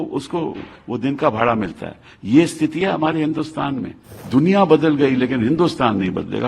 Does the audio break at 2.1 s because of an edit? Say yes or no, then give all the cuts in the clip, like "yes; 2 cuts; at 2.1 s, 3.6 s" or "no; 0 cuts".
no; 1 cut; at 4.1 s